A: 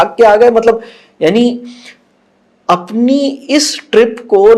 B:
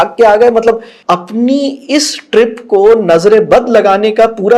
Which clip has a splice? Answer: B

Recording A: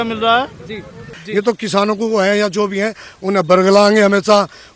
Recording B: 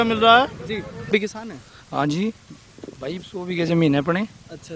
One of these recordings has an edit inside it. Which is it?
A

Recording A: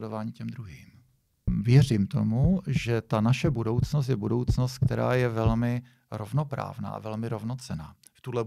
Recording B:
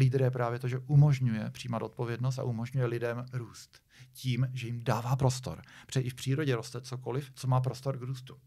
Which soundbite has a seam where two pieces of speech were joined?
A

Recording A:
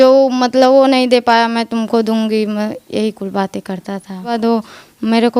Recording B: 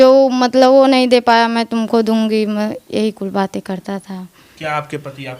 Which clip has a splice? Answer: A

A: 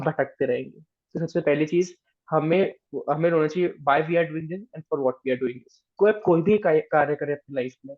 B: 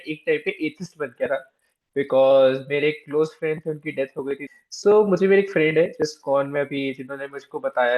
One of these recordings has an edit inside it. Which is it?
B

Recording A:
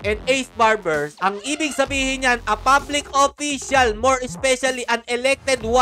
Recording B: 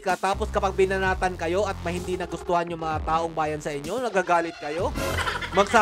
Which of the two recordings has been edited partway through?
A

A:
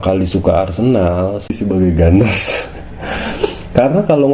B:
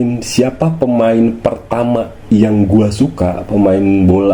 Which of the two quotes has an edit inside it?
A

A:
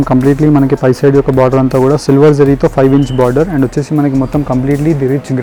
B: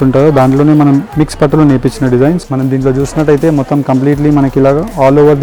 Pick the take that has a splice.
B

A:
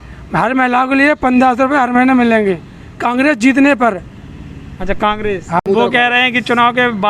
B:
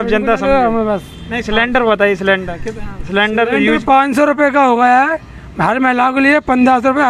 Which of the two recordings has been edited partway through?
A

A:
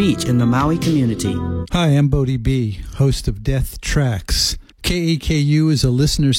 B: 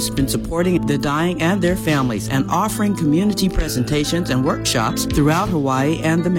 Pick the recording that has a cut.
A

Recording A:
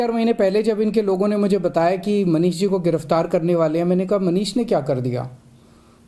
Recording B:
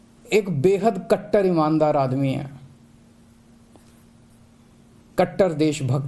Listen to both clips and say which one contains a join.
B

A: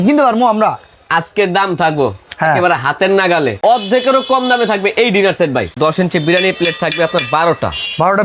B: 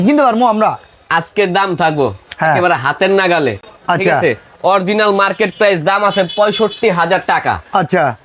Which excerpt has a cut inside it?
A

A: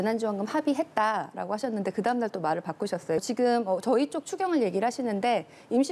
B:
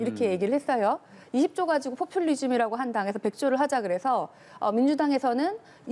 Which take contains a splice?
A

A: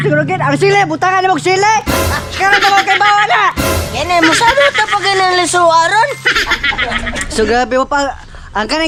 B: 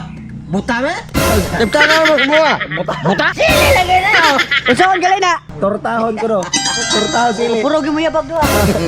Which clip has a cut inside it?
B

